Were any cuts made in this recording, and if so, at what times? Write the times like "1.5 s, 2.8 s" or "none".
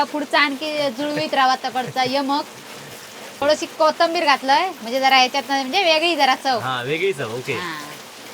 3.3 s